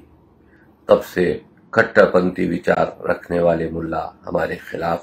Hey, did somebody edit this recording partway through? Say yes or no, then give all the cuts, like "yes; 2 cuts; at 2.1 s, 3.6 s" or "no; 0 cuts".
no; 0 cuts